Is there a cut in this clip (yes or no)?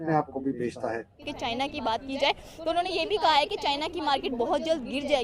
yes